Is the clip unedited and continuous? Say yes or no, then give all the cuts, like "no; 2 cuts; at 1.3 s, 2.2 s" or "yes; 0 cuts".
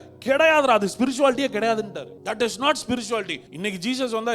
no; 2 cuts; at 2.1 s, 3.4 s